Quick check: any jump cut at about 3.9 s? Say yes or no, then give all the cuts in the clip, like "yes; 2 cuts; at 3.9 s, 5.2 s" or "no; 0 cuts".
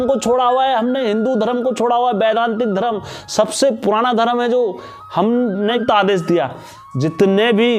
no; 1 cut; at 5.8 s